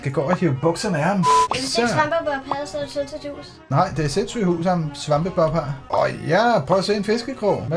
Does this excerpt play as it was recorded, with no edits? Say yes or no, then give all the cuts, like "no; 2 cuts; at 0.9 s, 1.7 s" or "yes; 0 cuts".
no; 2 cuts; at 1.4 s, 5.8 s